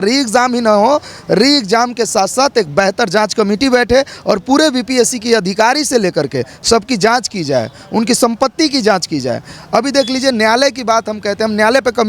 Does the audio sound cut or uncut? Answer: uncut